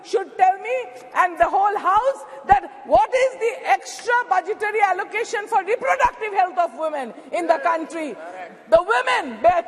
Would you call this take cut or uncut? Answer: uncut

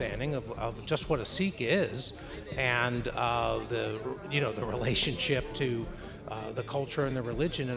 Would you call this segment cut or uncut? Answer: uncut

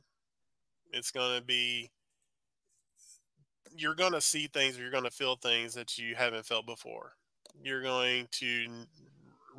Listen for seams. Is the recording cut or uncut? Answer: cut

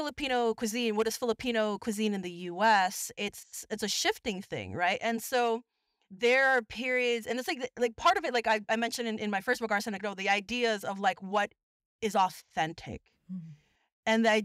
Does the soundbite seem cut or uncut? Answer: uncut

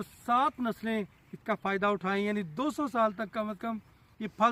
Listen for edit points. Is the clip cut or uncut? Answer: uncut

